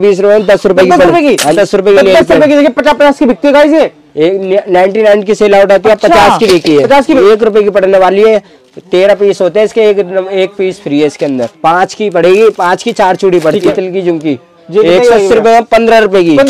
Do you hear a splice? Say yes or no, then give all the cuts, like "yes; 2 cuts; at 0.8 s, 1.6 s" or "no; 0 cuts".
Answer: yes; 4 cuts; at 1.5 s, 7.2 s, 11.5 s, 13.7 s